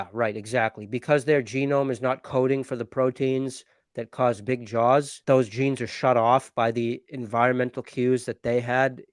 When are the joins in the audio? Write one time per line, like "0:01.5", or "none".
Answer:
0:05.1